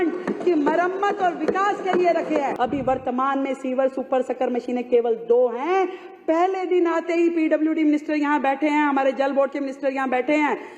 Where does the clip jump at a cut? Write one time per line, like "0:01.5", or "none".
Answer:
0:02.5

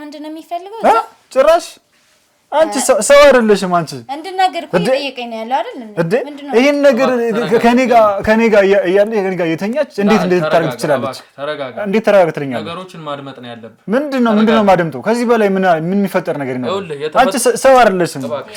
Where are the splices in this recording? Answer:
none

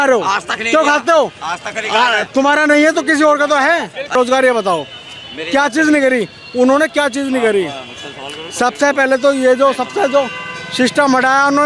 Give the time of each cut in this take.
0:04.2

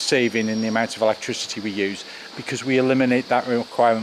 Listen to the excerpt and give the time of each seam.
0:02.2

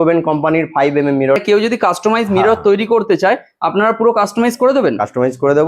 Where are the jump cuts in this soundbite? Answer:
0:01.4

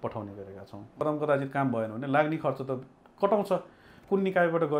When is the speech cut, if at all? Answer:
0:01.0

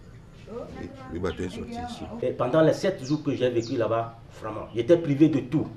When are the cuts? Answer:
0:02.0

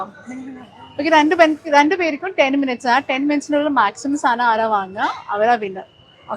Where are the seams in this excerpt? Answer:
none

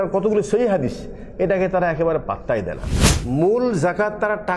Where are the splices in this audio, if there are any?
0:03.0

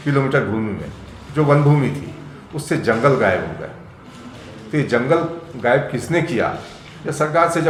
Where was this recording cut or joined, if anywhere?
none

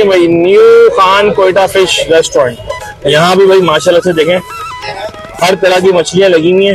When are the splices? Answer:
none

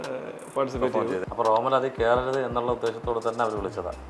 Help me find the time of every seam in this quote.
0:01.2

